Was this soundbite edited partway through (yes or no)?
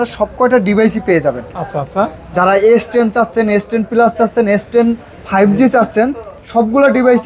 no